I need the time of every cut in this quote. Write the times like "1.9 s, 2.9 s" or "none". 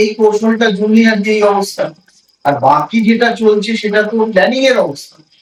none